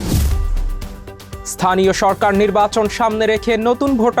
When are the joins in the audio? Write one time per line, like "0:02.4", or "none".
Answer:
0:00.9